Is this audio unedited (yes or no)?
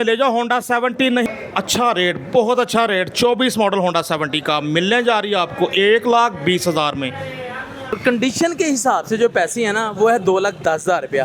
no